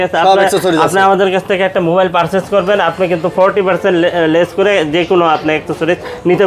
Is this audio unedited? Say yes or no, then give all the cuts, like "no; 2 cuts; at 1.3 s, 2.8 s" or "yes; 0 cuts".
yes; 0 cuts